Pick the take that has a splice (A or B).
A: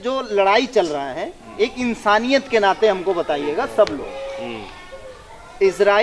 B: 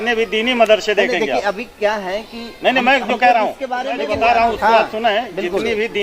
B